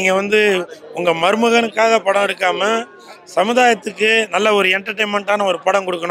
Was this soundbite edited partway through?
no; 0 cuts

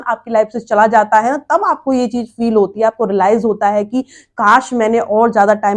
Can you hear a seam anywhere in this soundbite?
no; 0 cuts

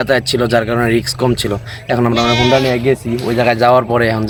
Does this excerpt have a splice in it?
no; 0 cuts

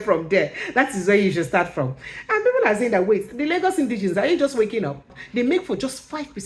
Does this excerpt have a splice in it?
yes; 1 cut; at 5.2 s

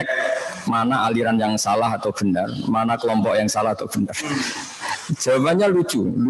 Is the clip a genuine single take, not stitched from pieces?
yes; 0 cuts

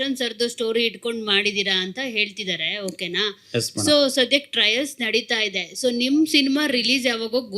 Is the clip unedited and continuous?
yes; 0 cuts

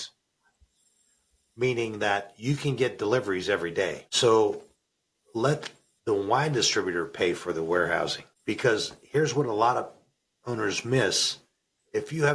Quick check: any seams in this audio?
yes; 2 cuts; at 4.0 s, 8.3 s

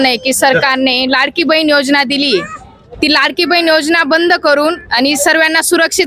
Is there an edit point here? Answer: no; 0 cuts

